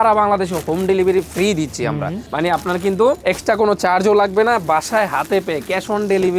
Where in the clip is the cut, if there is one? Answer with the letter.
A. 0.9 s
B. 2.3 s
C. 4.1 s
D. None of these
D